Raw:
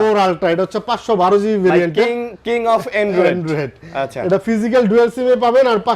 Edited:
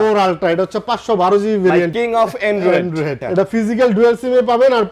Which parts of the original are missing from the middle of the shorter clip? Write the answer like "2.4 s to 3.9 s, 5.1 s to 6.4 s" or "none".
1.9 s to 2.4 s, 3.7 s to 4.2 s